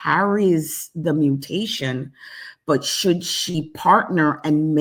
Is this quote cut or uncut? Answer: uncut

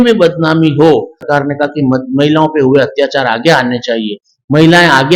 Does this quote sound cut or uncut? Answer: cut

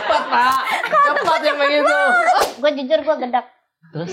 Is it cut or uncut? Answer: cut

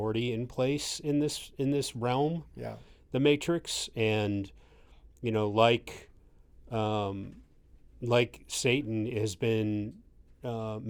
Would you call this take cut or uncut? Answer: uncut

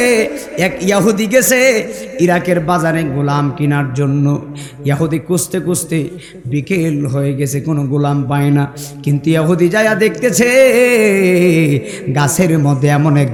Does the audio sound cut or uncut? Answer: uncut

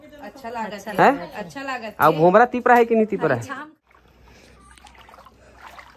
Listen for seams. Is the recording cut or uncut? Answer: cut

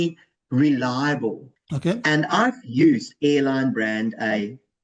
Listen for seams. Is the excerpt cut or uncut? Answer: cut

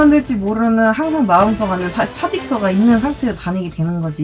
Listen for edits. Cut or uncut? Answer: uncut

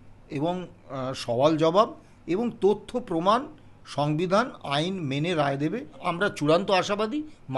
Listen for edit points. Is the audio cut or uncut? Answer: cut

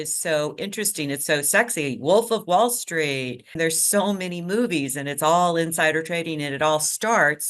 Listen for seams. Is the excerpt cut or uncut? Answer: cut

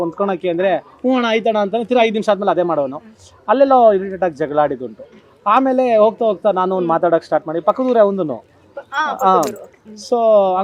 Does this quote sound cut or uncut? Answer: uncut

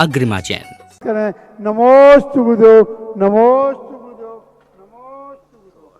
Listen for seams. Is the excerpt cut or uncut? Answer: cut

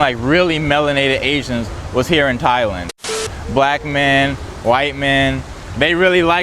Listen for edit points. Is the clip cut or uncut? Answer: cut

